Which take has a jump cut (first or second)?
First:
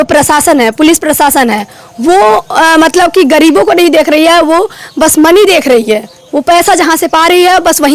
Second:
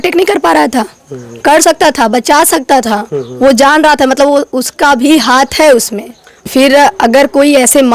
second